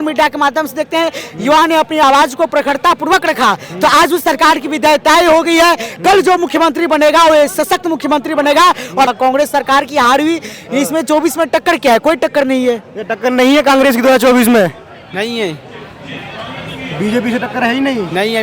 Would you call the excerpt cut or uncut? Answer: cut